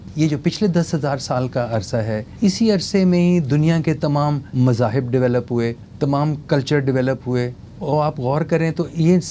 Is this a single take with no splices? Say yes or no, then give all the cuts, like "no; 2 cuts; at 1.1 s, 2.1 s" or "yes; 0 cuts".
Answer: no; 4 cuts; at 2.3 s, 4.4 s, 5.8 s, 7.7 s